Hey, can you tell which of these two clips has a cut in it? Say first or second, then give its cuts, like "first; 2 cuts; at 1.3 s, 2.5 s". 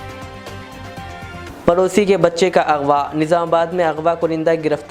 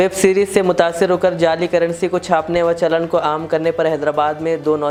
first; 1 cut; at 1.5 s